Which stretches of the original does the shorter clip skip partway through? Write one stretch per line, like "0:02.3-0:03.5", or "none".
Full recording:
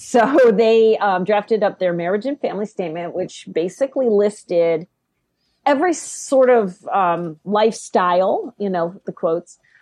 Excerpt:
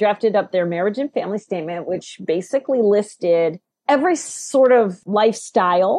0:04.9-0:05.5
0:06.8-0:07.4